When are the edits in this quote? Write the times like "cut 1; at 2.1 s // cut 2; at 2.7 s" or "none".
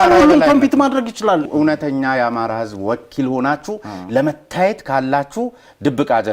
cut 1; at 1.4 s